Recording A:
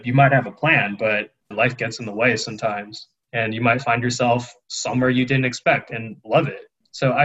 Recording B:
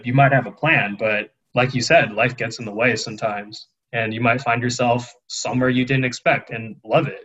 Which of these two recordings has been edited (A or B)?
A